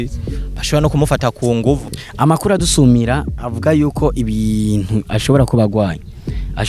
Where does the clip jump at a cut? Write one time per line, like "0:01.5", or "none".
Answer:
0:01.9